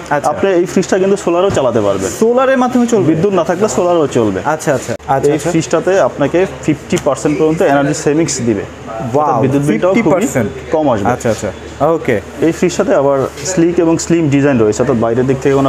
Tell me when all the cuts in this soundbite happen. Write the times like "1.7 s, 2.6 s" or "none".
4.9 s